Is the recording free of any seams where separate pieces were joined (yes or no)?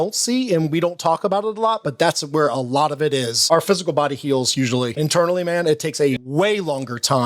no